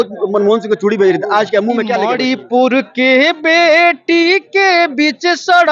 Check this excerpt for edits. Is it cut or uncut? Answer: cut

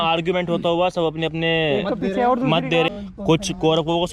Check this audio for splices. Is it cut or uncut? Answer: cut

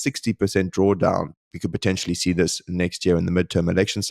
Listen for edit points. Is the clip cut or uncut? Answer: uncut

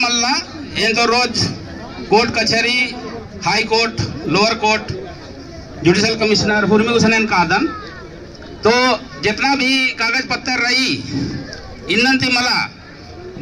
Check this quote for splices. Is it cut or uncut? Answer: uncut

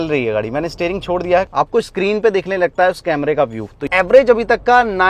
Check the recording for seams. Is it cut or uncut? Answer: cut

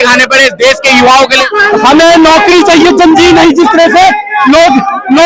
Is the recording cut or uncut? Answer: cut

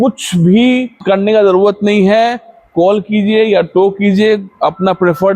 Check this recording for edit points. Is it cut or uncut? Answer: cut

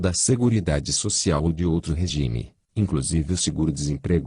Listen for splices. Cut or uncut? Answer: uncut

